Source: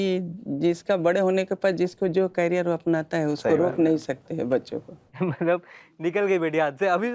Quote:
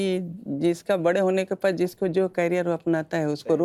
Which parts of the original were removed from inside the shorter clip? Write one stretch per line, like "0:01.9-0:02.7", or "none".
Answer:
none